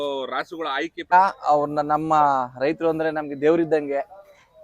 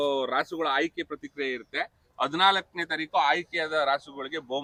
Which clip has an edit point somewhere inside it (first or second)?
first